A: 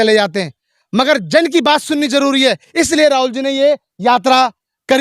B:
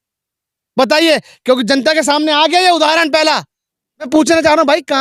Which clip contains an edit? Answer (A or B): B